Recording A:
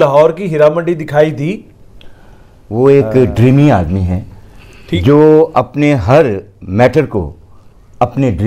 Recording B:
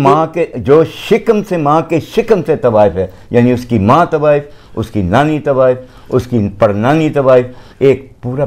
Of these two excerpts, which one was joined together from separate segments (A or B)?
A